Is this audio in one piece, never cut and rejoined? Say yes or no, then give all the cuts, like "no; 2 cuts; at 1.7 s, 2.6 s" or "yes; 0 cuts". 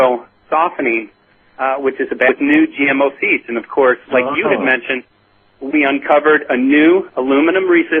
yes; 0 cuts